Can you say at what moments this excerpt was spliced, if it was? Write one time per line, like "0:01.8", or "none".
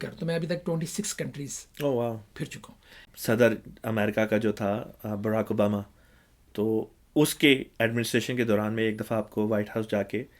0:03.0